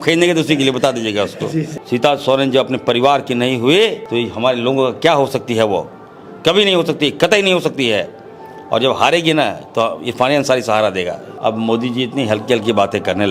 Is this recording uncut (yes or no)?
no